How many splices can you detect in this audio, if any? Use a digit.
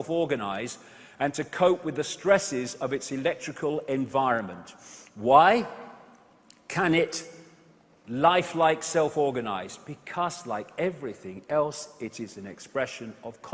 0